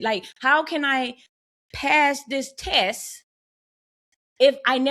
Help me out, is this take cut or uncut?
uncut